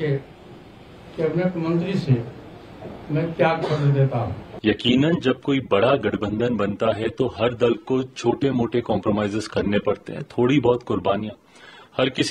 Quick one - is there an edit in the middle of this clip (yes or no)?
yes